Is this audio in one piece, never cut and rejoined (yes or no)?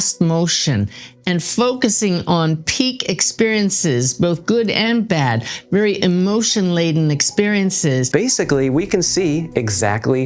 no